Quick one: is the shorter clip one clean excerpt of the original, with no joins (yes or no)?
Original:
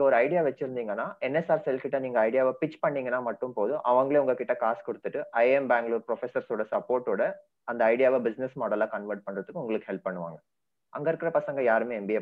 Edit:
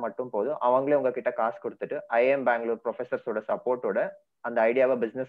yes